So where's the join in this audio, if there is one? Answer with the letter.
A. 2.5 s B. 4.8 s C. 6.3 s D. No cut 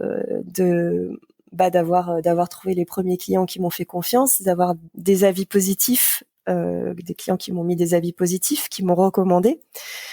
B